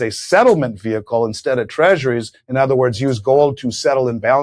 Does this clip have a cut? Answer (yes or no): no